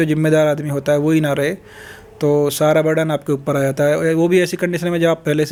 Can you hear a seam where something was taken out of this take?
no; 0 cuts

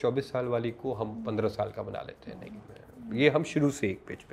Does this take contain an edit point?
no; 0 cuts

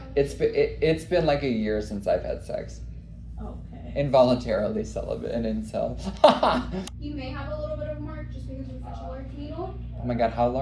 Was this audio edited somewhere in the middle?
yes; 1 cut; at 6.7 s

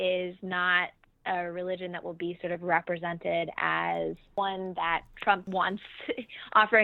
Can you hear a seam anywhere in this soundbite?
yes; 2 cuts; at 4.3 s, 5.4 s

